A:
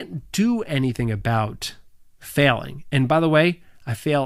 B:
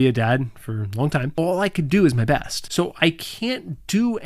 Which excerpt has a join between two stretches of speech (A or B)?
B